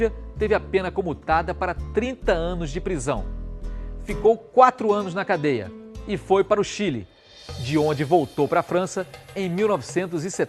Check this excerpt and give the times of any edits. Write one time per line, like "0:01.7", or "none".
none